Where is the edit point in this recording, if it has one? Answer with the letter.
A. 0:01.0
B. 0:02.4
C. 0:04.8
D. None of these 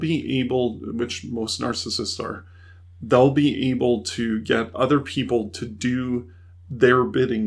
D